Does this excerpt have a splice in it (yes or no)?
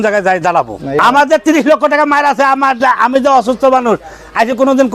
yes